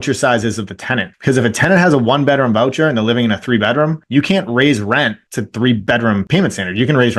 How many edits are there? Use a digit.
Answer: 2